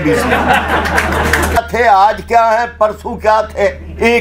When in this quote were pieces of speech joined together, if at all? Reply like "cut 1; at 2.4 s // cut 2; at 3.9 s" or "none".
cut 1; at 1.6 s

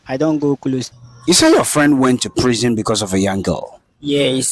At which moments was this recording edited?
cut 1; at 1.0 s

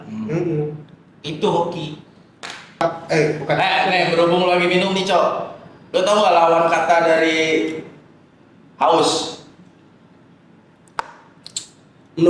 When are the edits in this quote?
cut 1; at 2.8 s

